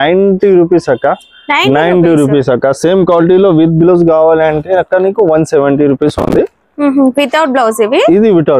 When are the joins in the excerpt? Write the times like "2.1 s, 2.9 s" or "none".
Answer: none